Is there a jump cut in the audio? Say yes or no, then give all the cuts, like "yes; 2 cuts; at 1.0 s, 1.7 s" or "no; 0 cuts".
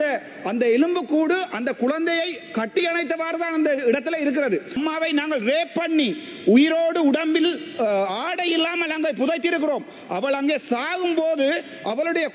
yes; 1 cut; at 4.7 s